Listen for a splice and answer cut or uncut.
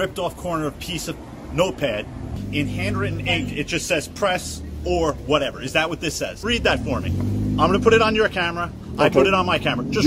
cut